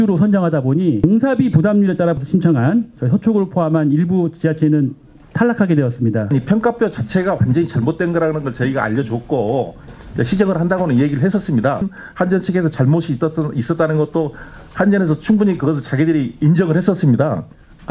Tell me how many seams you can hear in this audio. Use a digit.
5